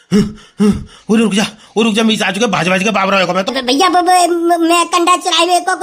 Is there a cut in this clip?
yes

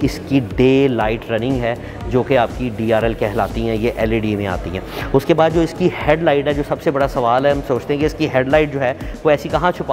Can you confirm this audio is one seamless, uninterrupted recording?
yes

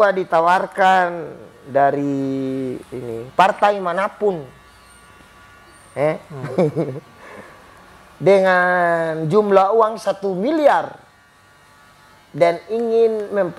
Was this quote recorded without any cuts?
yes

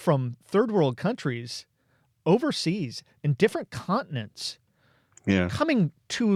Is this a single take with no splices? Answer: yes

